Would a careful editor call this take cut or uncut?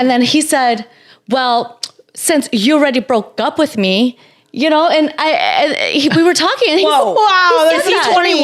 uncut